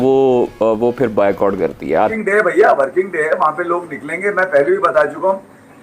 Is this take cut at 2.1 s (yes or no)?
yes